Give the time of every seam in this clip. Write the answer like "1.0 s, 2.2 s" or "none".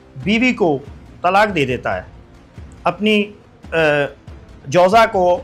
none